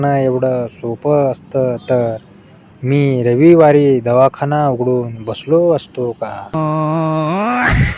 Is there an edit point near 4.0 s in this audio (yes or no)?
no